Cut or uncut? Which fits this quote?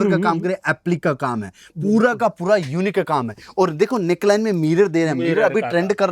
uncut